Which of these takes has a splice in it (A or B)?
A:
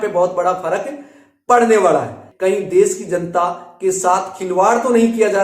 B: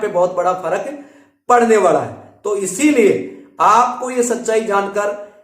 A